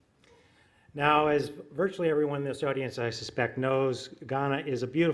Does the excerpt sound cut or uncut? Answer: uncut